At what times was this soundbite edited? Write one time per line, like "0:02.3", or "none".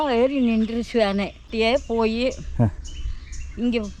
0:01.4